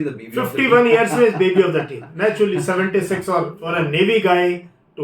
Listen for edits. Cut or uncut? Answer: cut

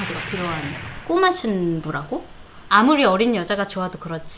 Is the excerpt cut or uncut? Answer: cut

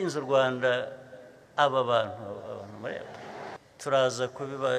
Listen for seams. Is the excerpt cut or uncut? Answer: cut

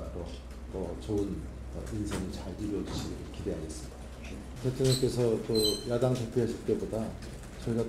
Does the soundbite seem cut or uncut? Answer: cut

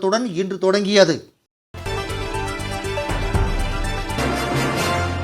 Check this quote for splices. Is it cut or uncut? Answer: cut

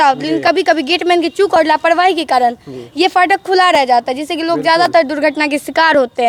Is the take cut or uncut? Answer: uncut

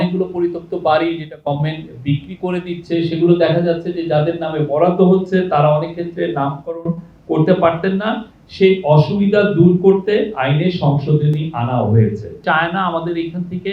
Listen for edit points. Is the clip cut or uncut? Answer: cut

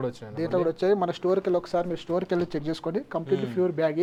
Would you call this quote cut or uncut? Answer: uncut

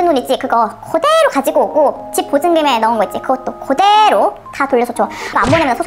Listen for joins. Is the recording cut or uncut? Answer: uncut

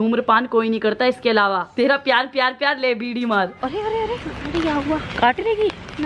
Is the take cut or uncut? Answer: cut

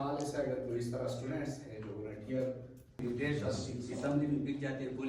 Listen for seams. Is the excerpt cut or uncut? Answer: cut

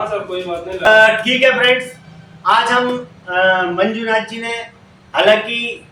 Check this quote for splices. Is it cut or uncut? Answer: uncut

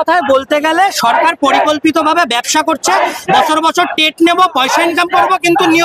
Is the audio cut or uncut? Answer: uncut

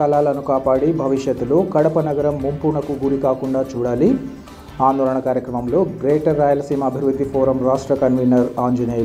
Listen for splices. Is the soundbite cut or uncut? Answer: uncut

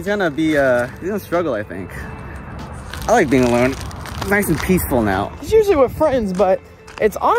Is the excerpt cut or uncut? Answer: uncut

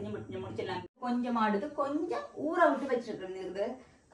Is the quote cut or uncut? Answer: cut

